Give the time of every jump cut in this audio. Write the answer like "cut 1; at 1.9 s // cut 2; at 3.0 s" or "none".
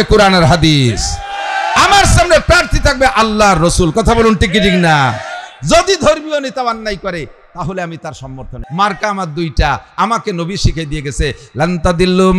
cut 1; at 8.6 s